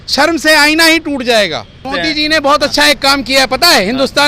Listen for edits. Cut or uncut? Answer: cut